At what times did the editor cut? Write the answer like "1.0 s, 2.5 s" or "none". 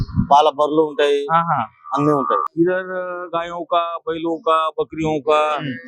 2.5 s